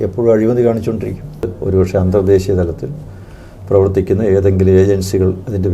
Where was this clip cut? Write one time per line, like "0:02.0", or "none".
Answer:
0:01.5